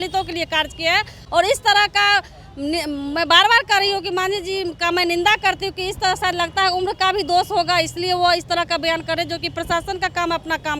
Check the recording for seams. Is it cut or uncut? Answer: uncut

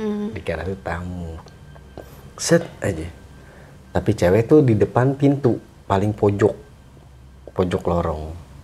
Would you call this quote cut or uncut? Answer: uncut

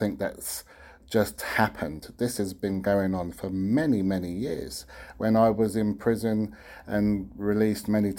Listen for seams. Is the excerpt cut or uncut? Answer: uncut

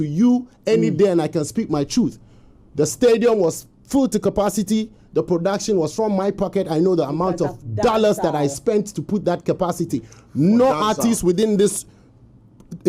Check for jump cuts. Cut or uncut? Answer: uncut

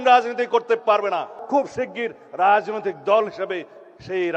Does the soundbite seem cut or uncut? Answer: cut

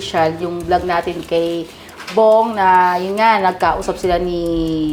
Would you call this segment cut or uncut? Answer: uncut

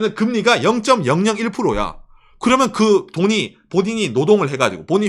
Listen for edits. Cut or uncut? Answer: uncut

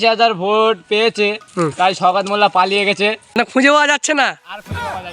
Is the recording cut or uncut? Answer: cut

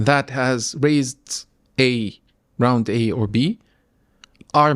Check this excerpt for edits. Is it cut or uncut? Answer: uncut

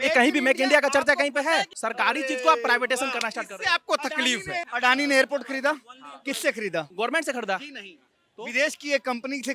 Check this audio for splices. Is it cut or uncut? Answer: cut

